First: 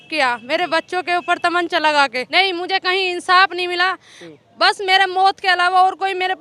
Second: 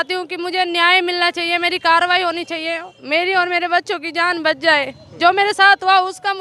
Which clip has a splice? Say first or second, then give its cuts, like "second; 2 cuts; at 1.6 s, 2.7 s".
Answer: first; 1 cut; at 2.2 s